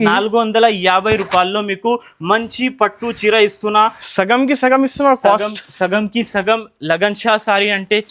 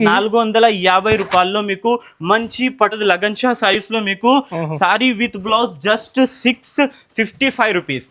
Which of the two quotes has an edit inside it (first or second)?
second